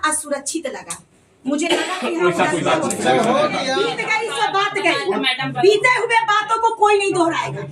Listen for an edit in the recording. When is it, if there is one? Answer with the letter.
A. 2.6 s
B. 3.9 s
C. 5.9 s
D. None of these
B